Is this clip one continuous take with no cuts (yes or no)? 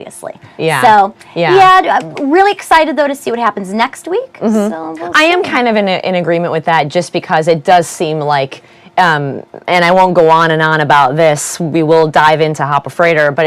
no